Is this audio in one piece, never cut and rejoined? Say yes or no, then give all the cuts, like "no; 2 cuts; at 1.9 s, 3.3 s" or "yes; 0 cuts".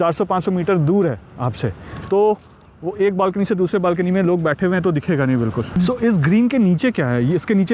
no; 1 cut; at 5.8 s